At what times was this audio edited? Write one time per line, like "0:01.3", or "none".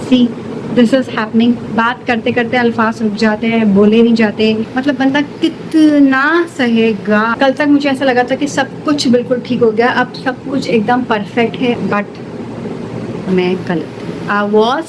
0:04.7
0:07.3
0:11.8